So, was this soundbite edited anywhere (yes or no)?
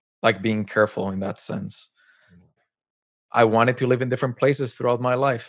yes